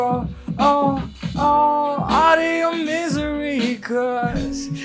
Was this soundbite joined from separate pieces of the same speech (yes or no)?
no